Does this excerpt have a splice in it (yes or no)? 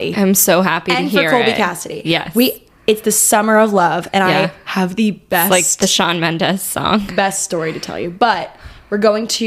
no